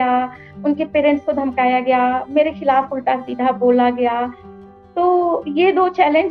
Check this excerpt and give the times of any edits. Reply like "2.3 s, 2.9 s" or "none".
none

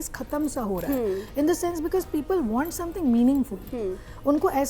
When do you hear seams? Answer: none

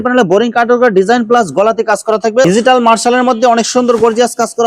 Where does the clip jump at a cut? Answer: 2.4 s

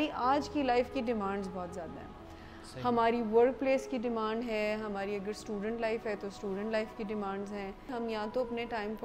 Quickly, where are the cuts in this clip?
7.9 s

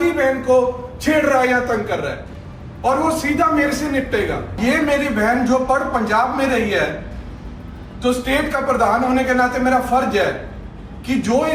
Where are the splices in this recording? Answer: 4.6 s

